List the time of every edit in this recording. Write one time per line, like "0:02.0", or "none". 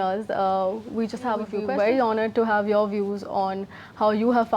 0:01.6